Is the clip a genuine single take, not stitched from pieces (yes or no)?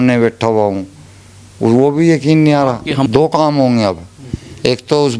no